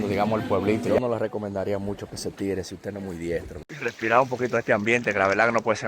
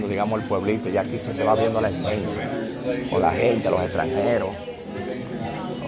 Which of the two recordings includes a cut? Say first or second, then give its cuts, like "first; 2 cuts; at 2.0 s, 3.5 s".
first; 2 cuts; at 0.9 s, 3.6 s